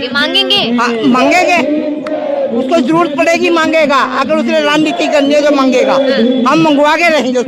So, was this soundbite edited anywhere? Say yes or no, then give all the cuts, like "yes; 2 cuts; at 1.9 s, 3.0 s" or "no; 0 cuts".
no; 0 cuts